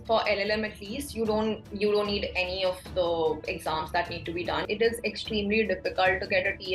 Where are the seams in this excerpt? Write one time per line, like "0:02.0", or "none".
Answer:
0:04.6